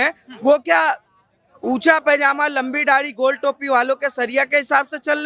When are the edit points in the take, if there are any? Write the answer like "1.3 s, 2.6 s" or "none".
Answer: none